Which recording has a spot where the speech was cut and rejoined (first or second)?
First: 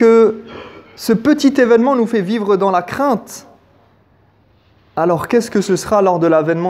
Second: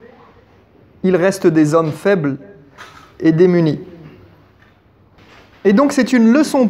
second